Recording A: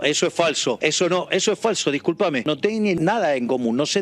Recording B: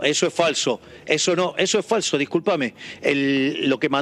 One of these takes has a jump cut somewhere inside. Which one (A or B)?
A